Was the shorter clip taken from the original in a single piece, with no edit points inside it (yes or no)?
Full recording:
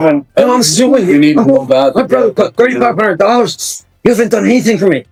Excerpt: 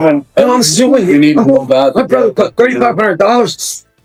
yes